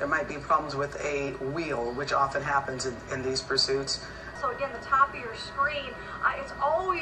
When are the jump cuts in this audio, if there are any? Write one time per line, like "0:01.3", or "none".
0:04.3